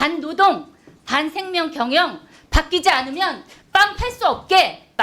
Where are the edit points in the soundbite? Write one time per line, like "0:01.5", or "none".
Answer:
none